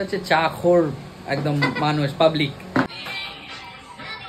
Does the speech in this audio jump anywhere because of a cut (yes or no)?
yes